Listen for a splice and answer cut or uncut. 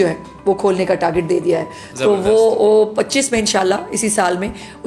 uncut